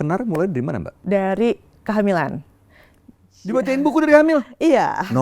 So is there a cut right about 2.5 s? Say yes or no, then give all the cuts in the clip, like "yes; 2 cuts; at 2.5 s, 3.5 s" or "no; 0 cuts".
no; 1 cut; at 0.9 s